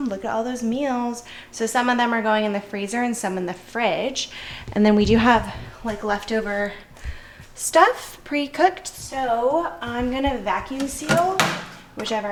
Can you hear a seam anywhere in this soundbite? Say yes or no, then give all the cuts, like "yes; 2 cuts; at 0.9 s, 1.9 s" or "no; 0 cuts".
no; 0 cuts